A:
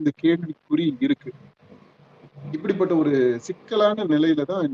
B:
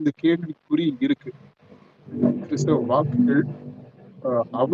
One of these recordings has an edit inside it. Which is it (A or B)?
B